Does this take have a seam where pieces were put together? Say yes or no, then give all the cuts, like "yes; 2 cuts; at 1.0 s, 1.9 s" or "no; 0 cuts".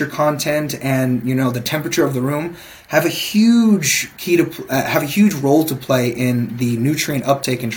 no; 0 cuts